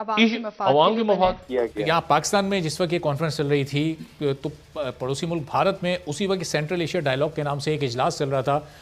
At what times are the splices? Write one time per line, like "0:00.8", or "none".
0:01.4